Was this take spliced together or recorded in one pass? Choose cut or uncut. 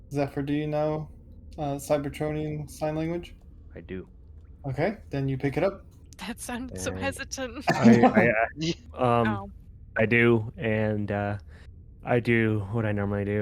cut